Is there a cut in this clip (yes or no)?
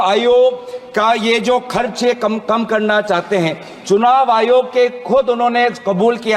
no